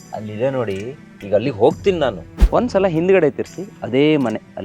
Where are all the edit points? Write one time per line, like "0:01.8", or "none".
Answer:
0:02.3